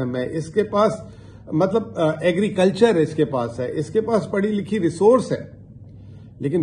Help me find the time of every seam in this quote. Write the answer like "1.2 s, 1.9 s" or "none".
none